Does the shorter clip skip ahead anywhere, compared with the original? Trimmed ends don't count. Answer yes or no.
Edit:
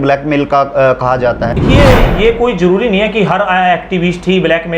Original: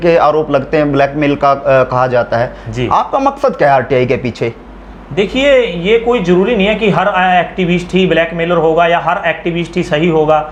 yes